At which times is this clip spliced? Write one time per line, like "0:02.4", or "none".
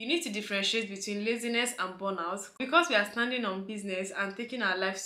0:02.6